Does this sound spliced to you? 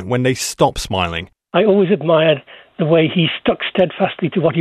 yes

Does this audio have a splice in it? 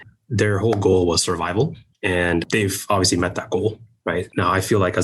no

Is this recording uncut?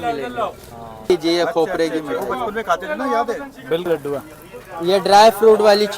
no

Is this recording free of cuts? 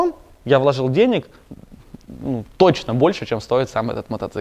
yes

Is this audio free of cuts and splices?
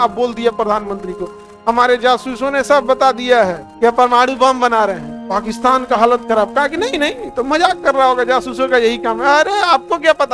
no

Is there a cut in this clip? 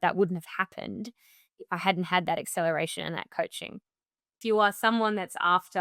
yes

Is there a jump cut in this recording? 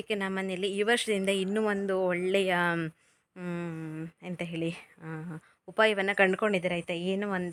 no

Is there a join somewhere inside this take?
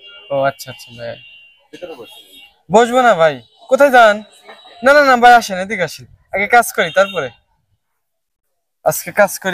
no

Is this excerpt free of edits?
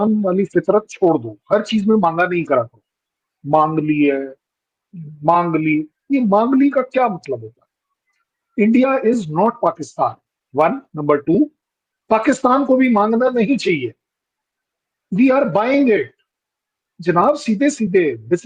yes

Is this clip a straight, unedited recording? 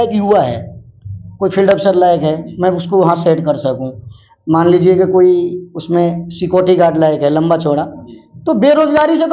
yes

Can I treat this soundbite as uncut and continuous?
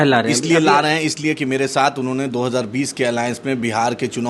yes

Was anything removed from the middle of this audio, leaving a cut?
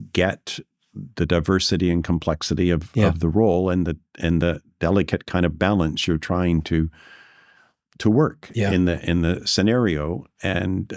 no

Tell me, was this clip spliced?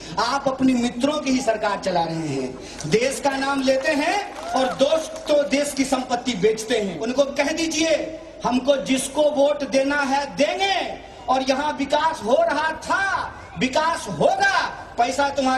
yes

